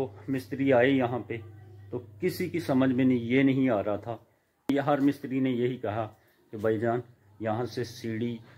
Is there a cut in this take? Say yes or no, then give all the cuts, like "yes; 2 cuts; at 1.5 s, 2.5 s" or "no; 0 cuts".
yes; 1 cut; at 4.7 s